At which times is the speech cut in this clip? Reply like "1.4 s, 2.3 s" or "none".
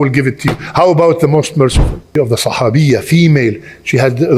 2.1 s